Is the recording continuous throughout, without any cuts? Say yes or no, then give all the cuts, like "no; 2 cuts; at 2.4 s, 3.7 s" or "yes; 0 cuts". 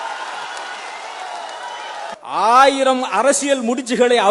no; 1 cut; at 2.2 s